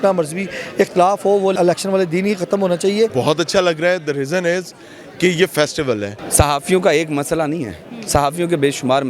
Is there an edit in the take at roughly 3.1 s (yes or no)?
yes